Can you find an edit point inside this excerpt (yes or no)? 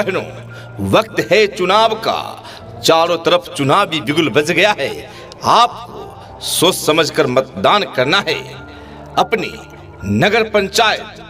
no